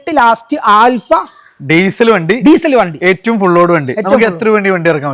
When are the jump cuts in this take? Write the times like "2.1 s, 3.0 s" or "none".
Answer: none